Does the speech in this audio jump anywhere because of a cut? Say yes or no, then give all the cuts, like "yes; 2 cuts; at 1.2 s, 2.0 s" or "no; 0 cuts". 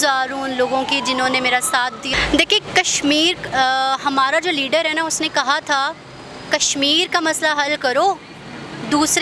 yes; 1 cut; at 2.1 s